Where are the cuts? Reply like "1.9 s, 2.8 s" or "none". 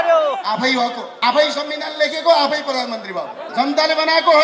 1.1 s, 3.4 s